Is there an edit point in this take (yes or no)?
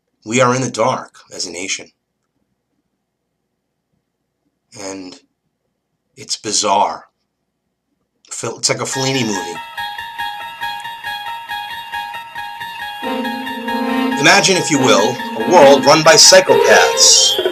no